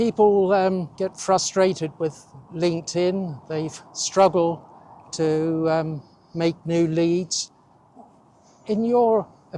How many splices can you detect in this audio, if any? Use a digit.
1